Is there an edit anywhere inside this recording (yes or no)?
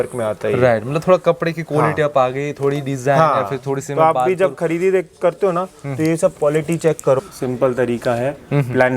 yes